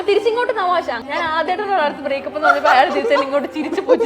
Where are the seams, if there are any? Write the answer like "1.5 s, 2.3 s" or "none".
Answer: 1.0 s